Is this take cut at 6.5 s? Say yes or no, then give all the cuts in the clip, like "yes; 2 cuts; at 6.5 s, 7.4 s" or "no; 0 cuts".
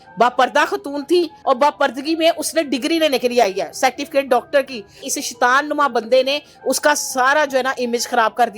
no; 2 cuts; at 1.3 s, 5.0 s